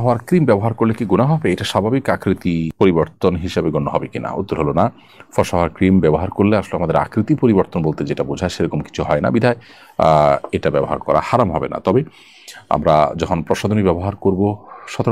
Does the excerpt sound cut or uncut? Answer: uncut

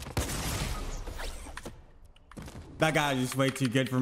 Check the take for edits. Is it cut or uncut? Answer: cut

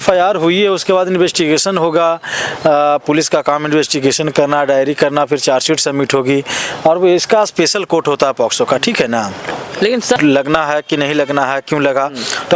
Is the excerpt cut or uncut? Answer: cut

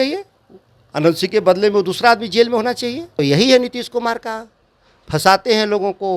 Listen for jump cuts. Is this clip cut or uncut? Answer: cut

